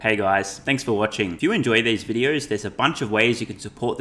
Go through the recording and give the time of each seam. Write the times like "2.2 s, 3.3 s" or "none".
0.9 s